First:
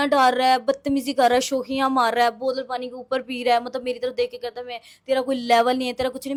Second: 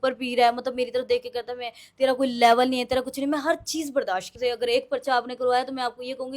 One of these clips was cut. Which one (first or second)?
second